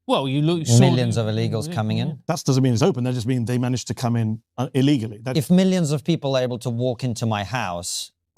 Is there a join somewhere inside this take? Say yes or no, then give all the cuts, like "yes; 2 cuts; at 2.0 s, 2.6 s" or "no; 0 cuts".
yes; 1 cut; at 5.3 s